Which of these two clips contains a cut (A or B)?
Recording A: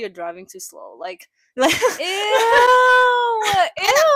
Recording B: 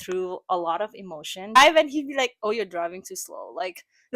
B